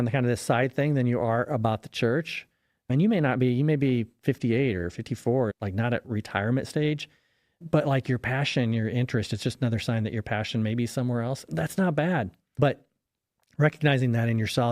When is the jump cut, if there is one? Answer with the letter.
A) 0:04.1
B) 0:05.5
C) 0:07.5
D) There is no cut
B